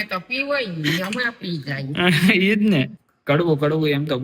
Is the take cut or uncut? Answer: cut